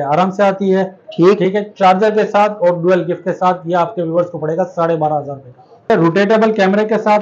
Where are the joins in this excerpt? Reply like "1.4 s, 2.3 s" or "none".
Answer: 5.9 s